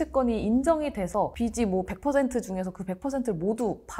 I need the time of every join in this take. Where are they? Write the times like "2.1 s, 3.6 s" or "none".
none